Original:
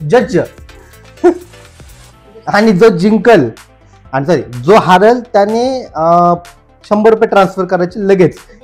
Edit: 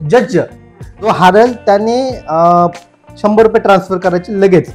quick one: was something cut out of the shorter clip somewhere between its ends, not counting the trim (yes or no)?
yes